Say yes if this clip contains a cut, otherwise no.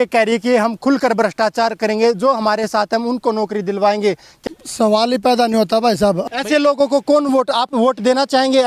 yes